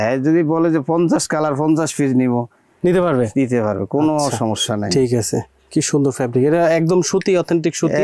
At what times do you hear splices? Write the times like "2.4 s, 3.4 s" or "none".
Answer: none